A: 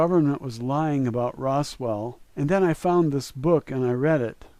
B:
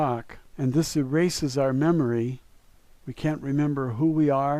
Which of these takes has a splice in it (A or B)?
B